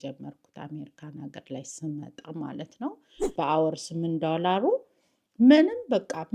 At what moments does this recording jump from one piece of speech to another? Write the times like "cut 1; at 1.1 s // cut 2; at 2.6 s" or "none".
cut 1; at 3.3 s

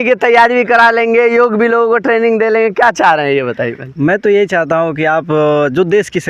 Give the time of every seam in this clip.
none

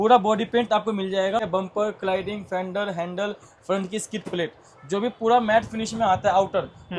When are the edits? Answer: cut 1; at 1.5 s

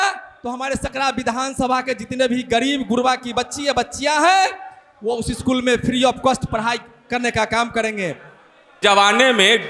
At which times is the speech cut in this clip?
cut 1; at 8.8 s

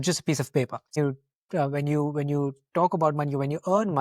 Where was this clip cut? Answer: cut 1; at 0.9 s

